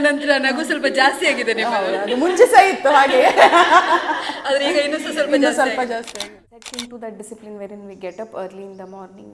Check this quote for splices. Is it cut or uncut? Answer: cut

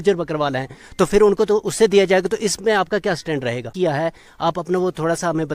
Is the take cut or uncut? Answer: cut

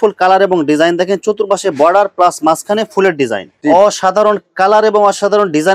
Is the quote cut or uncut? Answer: cut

